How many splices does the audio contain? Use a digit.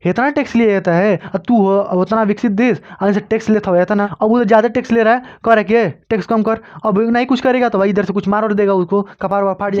2